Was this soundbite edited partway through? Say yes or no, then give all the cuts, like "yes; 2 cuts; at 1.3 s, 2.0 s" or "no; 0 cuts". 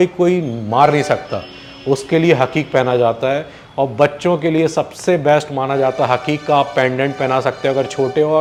no; 0 cuts